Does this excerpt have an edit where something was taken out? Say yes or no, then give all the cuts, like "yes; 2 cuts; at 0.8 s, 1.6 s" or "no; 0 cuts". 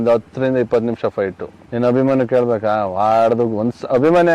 no; 0 cuts